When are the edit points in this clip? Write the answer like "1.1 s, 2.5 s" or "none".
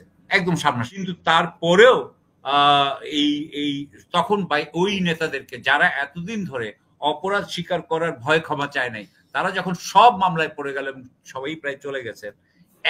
1.0 s